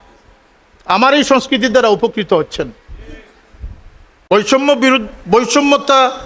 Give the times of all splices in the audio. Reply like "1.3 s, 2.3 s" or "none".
4.1 s